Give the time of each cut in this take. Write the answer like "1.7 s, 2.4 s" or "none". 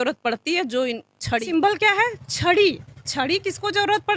1.4 s

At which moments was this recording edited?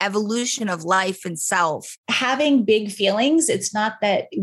2.0 s

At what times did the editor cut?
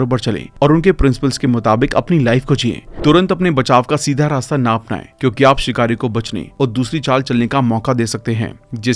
2.8 s

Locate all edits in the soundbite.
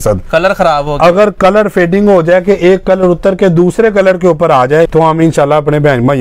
4.9 s

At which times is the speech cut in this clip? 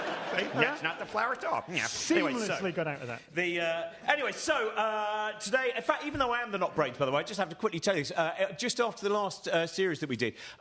7.9 s

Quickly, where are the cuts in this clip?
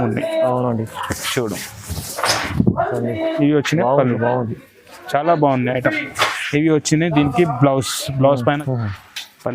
8.6 s

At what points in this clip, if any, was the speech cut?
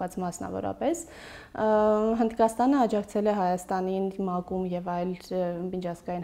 none

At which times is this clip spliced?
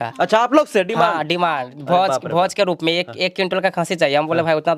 none

